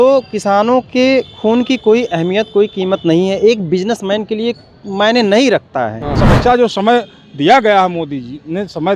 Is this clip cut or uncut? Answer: cut